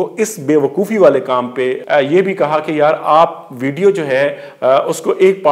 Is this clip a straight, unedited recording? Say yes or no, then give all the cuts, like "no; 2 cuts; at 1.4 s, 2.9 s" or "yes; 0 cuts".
no; 1 cut; at 1.8 s